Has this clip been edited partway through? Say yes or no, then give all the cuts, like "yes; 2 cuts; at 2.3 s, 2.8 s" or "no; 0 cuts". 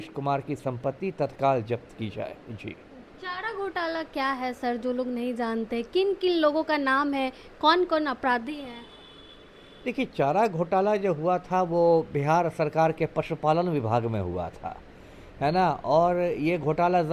no; 0 cuts